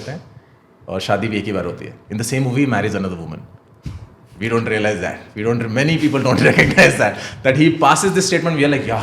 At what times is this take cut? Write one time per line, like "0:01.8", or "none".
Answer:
none